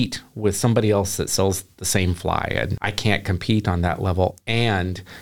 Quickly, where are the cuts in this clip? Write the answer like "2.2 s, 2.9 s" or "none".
2.8 s